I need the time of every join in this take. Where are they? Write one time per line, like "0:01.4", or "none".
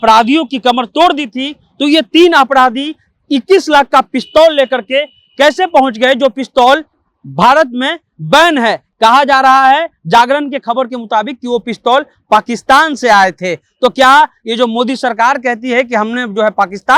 none